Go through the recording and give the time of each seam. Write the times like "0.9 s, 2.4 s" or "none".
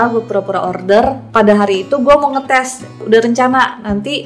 1.2 s, 3.0 s